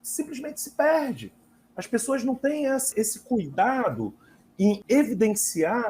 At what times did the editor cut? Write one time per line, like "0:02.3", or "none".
0:02.9
0:04.8